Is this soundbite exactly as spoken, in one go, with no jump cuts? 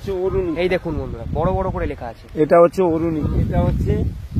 no; 1 cut; at 3.2 s

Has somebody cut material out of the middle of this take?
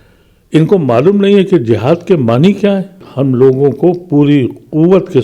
yes; 1 cut; at 3.1 s

